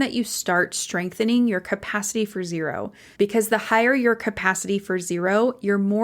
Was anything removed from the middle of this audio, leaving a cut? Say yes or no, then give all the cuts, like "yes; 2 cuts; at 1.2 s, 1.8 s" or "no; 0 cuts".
yes; 1 cut; at 3.0 s